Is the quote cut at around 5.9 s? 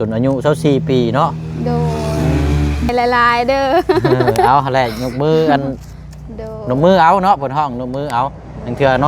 no; 1 cut; at 2.9 s

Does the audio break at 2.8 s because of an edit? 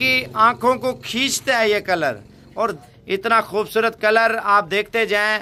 yes; 1 cut; at 2.8 s

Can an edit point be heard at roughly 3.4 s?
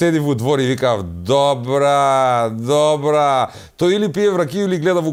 no; 0 cuts

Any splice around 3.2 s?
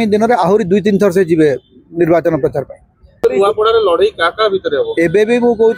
yes; 1 cut; at 3.2 s

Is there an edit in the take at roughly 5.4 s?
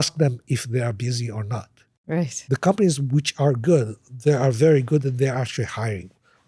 no; 1 cut; at 2.4 s

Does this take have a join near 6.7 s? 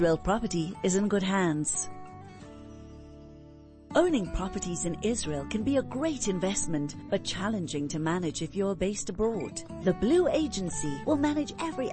no; 2 cuts; at 1.7 s, 3.8 s

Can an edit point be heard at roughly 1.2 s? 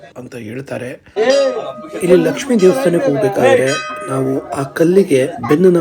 yes; 1 cut; at 1.2 s

